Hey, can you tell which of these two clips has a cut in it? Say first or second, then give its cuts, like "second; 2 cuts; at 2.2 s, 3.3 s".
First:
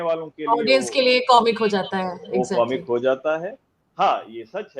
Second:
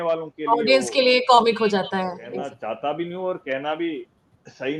second; 1 cut; at 2.2 s